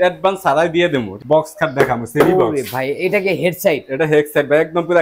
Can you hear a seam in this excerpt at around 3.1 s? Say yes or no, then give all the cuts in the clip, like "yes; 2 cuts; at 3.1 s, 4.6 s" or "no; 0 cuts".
no; 1 cut; at 1.2 s